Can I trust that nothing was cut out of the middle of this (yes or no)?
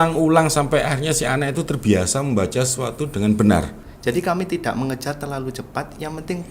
no